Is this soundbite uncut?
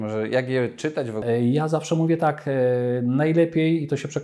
no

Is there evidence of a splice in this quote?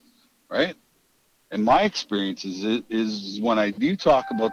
no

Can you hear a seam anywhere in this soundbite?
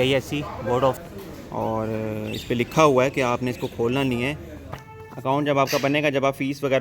yes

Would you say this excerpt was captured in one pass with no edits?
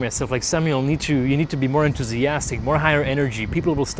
yes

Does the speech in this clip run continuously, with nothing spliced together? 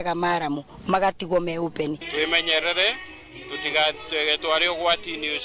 no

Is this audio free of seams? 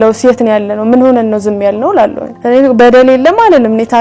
no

